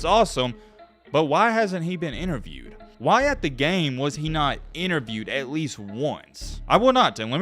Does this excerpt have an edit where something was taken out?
yes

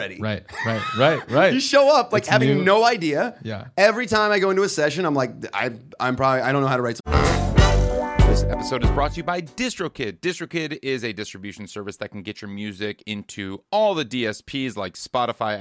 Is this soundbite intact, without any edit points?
no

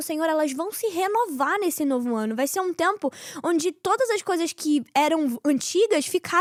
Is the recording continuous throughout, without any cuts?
yes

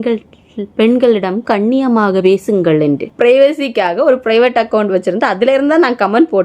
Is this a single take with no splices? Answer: no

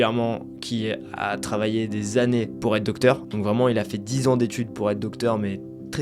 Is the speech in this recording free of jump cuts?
yes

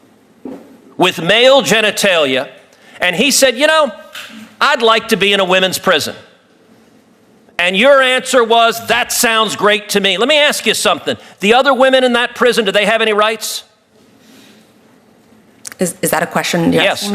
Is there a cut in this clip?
no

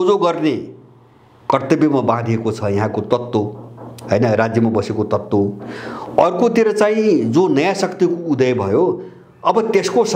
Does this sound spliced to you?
no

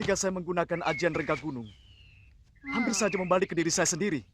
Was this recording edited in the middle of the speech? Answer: no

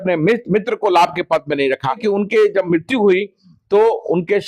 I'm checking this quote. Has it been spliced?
yes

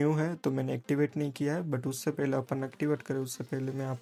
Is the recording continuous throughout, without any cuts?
yes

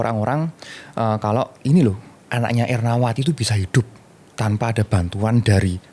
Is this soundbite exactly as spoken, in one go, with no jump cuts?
yes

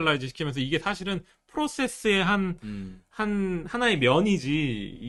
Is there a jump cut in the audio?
no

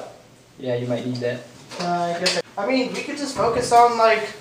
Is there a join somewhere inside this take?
yes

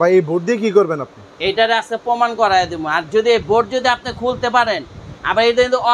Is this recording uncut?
yes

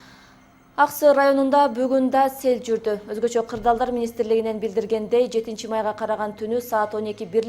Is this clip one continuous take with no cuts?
no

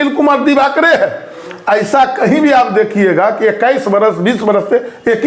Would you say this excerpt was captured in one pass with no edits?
yes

